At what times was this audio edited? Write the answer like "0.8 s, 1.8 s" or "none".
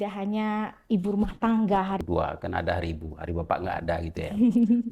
2.0 s